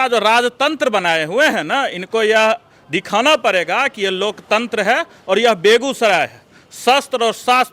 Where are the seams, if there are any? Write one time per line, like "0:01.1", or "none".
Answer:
none